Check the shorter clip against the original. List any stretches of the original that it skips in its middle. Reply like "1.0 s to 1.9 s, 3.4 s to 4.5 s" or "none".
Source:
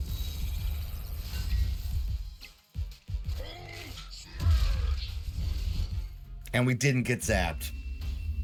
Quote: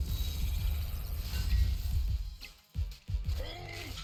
none